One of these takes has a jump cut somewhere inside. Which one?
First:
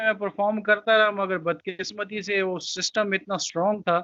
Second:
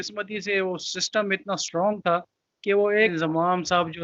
second; 1 cut; at 3.1 s

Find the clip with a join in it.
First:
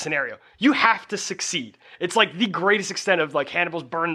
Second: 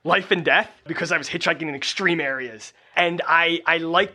second; 2 cuts; at 0.9 s, 2.9 s

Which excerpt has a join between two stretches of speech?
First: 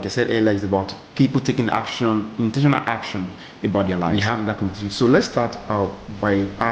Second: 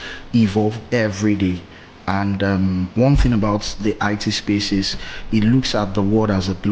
first; 1 cut; at 4.1 s

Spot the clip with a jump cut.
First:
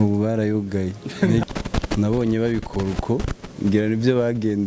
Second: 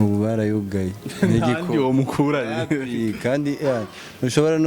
first; 1 cut; at 1.4 s

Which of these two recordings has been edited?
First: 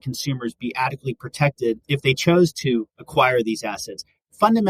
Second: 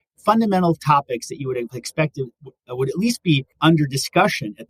first; 2 cuts; at 1.8 s, 3.0 s

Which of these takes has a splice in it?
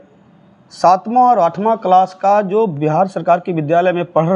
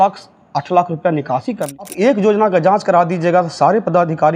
second; 1 cut; at 1.8 s

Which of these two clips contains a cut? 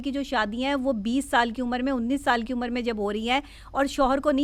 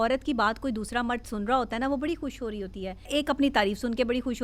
second; 1 cut; at 3.1 s

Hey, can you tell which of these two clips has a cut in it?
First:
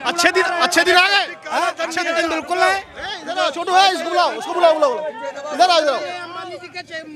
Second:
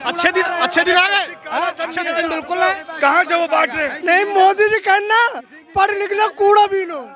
second; 1 cut; at 2.9 s

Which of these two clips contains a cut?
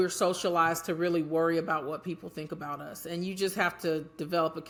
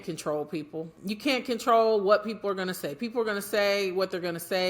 second; 1 cut; at 0.9 s

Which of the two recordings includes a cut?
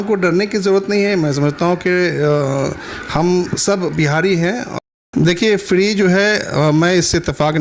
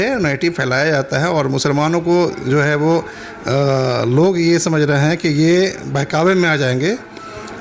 first; 1 cut; at 4.7 s

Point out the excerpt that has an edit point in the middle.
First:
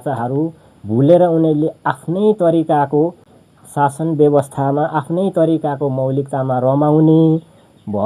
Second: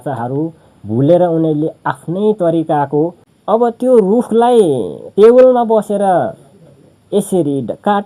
second; 1 cut; at 3.3 s

